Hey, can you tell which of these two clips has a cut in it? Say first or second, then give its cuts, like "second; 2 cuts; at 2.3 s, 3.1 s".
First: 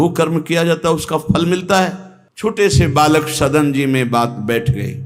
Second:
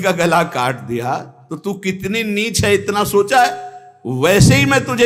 first; 1 cut; at 2.1 s